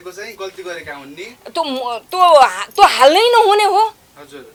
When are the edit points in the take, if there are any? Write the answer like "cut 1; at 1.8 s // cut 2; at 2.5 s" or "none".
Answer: none